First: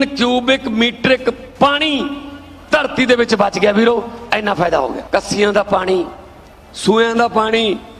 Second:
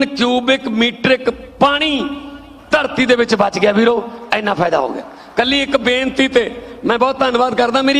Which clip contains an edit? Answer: first; 1 cut; at 5.0 s

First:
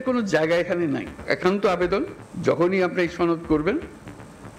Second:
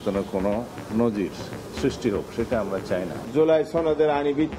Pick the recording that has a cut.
second; 1 cut; at 3.2 s

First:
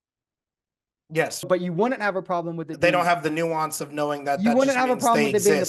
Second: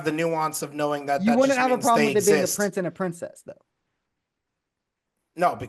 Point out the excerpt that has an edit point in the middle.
first; 1 cut; at 1.5 s

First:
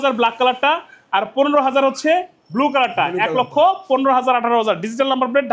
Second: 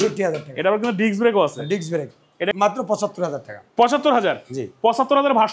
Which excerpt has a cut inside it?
second; 1 cut; at 2.5 s

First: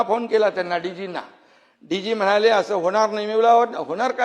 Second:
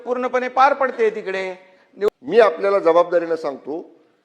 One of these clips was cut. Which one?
second; 1 cut; at 2.1 s

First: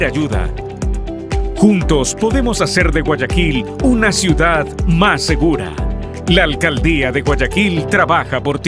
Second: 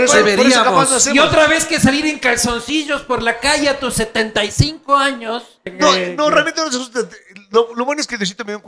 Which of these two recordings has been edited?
second; 1 cut; at 5.6 s

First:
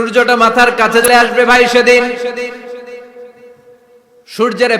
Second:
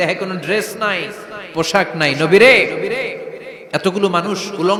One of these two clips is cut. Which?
first; 1 cut; at 1.1 s

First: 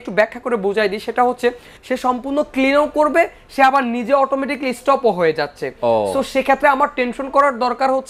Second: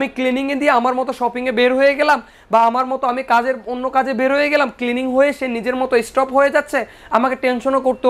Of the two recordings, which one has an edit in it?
first; 1 cut; at 1.7 s

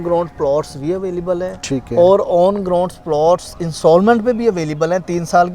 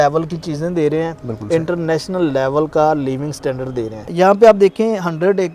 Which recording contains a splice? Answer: second; 1 cut; at 4.1 s

